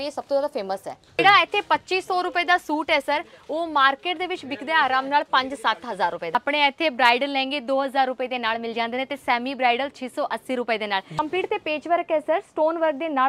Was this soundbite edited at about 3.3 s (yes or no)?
no